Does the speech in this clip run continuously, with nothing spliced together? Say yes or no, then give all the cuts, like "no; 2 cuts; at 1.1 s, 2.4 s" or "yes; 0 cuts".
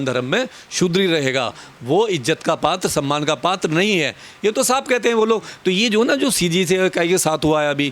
yes; 0 cuts